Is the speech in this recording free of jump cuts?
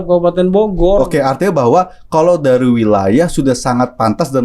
yes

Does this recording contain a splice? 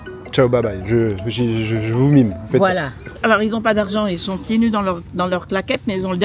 yes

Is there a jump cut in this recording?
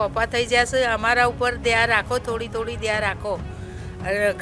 no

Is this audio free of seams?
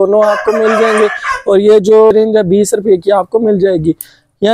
no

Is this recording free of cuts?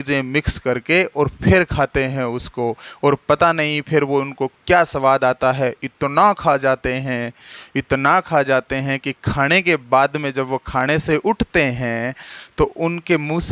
yes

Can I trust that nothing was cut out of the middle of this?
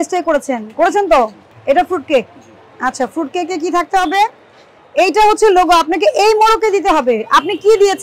no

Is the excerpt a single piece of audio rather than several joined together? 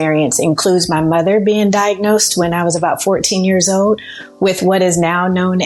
yes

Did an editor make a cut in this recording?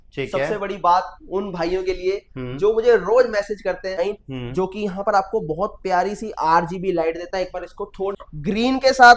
yes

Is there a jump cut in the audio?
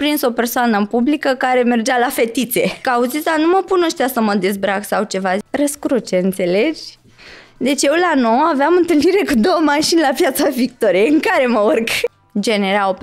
yes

